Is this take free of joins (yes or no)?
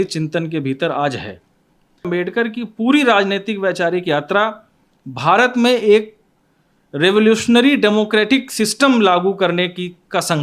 no